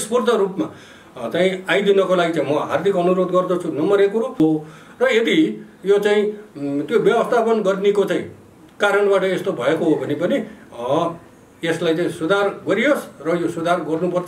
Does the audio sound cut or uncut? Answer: cut